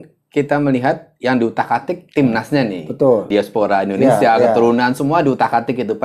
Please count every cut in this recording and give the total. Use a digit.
1